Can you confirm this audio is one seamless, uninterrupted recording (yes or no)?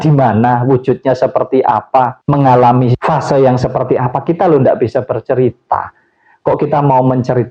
yes